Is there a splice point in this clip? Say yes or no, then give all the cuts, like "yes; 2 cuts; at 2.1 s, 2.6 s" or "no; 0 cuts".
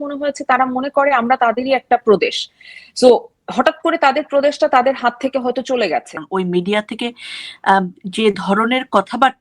yes; 1 cut; at 6.3 s